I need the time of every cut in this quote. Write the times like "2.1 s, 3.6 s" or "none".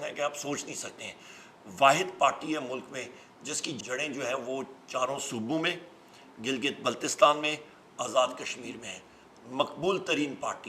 3.8 s